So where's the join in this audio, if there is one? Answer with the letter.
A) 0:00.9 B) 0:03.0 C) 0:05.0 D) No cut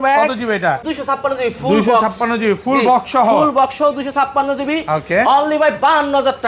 A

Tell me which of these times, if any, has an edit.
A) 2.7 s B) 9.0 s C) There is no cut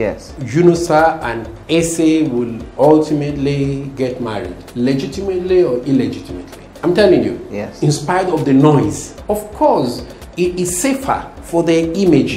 B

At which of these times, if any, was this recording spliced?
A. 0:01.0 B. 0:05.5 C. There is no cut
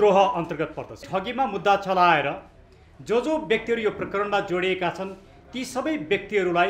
A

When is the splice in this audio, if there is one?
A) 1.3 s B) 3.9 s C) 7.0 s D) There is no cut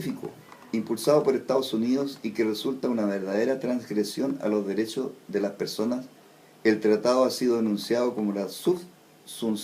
A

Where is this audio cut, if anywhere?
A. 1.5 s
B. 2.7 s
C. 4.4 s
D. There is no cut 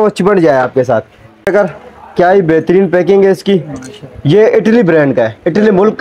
A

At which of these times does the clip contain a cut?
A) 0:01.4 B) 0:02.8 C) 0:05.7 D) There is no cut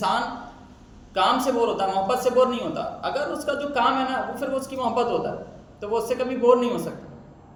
D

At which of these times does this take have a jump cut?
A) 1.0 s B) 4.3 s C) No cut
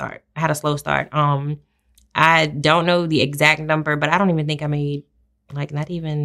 C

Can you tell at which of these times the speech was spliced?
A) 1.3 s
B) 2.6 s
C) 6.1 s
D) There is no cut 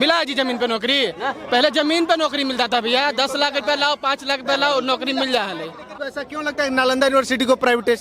C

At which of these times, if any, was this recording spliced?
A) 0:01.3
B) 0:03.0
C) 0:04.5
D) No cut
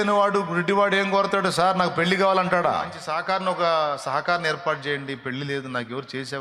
B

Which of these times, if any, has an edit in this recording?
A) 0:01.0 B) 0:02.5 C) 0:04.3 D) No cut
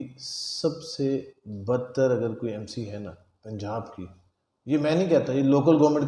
D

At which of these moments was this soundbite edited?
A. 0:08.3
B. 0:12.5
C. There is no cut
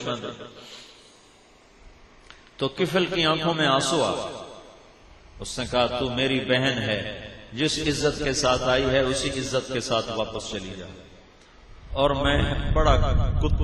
B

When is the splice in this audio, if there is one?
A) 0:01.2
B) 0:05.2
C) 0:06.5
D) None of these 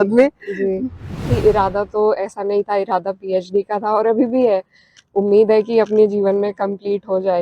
A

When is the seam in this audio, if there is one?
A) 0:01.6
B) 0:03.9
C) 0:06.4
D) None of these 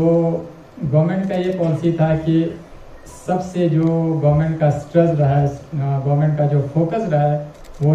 D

